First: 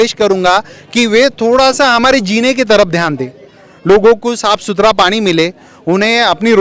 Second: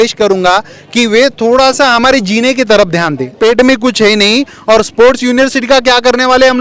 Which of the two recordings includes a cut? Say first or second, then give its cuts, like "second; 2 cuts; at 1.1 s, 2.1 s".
second; 1 cut; at 3.4 s